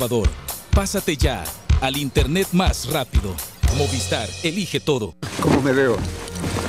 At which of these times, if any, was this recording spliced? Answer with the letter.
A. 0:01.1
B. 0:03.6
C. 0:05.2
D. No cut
C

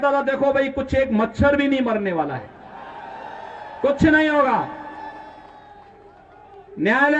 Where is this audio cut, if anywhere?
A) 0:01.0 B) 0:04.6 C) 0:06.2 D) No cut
D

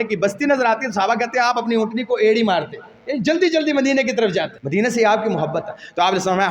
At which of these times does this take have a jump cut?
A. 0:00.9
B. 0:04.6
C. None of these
B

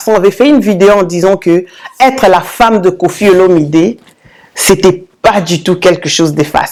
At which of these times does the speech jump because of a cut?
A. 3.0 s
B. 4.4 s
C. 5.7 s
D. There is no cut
D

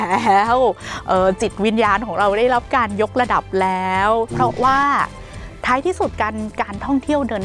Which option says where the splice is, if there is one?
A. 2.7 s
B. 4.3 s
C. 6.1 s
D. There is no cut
B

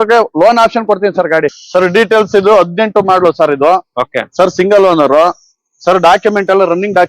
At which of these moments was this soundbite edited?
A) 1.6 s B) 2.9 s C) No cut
A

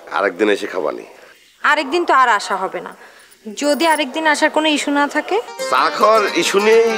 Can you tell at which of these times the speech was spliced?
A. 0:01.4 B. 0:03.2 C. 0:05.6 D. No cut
C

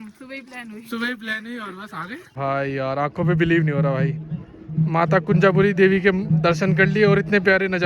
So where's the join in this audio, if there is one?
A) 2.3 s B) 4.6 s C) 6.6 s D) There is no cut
A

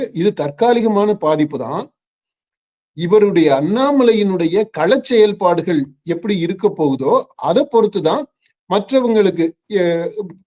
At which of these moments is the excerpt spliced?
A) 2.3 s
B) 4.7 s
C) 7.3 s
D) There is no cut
D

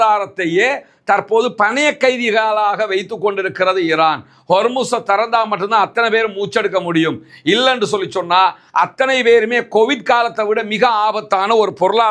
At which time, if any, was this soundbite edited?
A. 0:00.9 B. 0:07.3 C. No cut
C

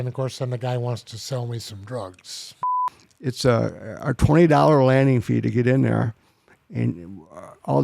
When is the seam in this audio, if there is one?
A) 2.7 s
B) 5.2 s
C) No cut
A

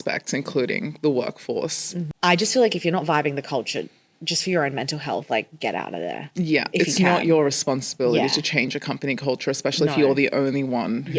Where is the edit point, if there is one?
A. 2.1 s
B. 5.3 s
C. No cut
A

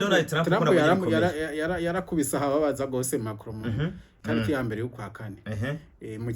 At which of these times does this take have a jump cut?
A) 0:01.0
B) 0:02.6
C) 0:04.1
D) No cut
C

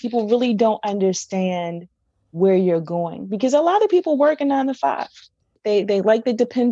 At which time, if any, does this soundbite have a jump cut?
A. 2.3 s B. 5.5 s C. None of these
B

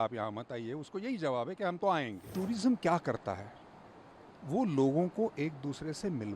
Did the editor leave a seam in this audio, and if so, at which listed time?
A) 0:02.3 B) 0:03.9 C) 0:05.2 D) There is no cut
A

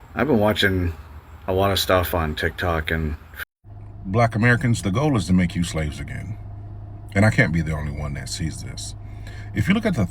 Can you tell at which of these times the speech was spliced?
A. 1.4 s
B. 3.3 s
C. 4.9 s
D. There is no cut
B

